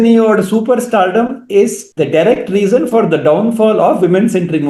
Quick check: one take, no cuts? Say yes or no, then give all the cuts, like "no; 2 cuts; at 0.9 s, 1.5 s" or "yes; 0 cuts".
no; 1 cut; at 1.8 s